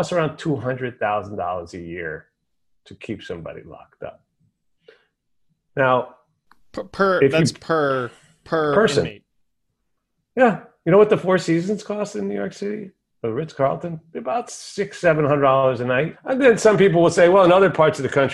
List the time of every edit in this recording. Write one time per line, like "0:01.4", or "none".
0:16.2